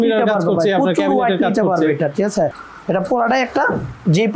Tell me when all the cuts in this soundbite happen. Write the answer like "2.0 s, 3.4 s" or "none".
2.6 s